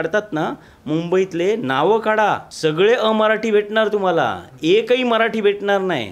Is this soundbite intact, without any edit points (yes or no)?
no